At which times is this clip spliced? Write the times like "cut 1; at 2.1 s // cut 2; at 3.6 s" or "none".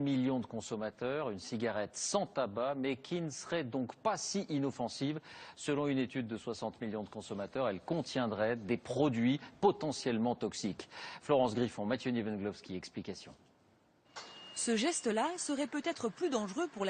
cut 1; at 7.0 s

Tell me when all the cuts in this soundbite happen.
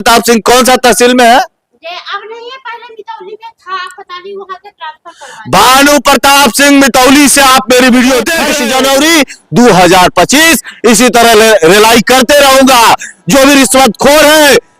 cut 1; at 8.4 s

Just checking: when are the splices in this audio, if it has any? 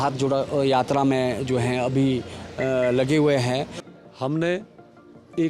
cut 1; at 3.8 s

